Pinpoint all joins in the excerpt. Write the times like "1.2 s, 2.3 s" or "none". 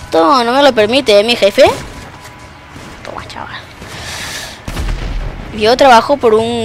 none

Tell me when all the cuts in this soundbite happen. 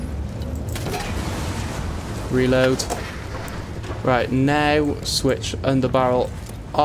none

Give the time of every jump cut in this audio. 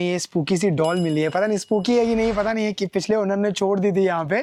none

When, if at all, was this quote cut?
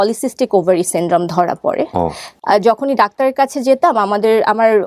2.3 s

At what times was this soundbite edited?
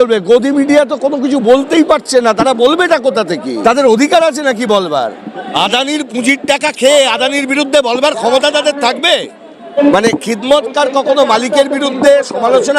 3.5 s, 5.5 s, 9.8 s

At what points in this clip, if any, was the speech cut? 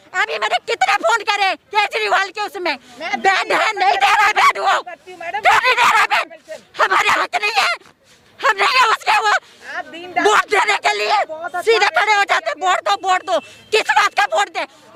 none

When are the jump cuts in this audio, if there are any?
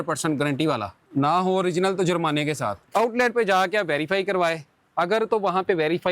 1.0 s, 2.9 s

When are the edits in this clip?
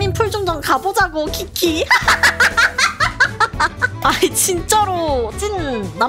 none

